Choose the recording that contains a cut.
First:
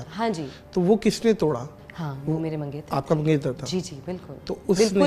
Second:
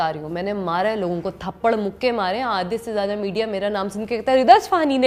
first; 1 cut; at 1.8 s

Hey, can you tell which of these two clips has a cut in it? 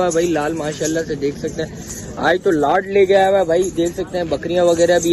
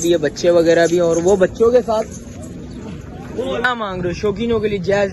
second; 1 cut; at 3.6 s

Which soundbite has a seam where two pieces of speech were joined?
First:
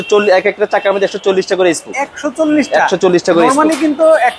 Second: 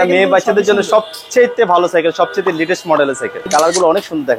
second; 1 cut; at 3.5 s

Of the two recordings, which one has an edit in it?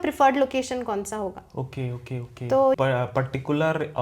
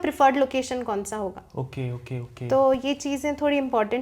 first; 1 cut; at 2.8 s

